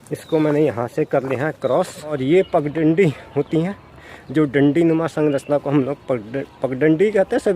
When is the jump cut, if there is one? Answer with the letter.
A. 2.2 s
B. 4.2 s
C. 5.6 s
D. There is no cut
A